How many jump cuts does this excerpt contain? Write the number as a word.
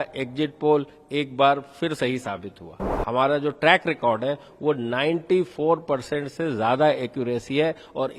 one